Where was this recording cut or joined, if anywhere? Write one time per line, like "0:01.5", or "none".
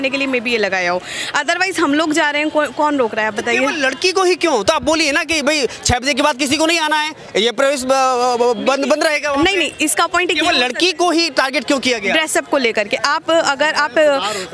none